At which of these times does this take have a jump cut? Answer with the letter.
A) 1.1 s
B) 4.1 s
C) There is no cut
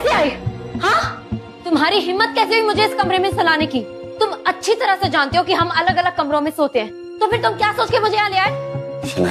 C